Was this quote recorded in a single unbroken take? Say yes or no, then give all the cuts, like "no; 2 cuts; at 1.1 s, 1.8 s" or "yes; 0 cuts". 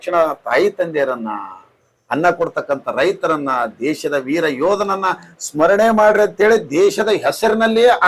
yes; 0 cuts